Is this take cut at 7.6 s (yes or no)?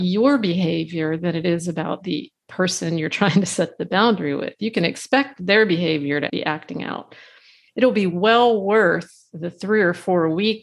yes